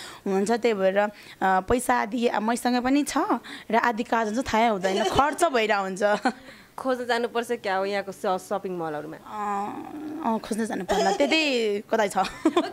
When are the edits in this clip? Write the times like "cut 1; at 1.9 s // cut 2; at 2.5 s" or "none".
none